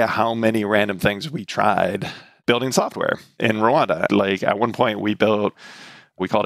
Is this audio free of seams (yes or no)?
yes